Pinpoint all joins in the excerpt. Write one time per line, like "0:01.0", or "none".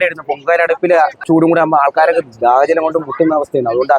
0:01.2